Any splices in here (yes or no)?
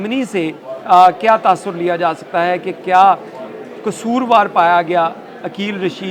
no